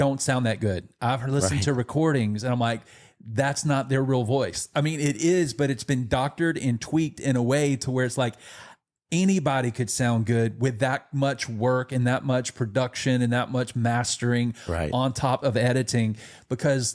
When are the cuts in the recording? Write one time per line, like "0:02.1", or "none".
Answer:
none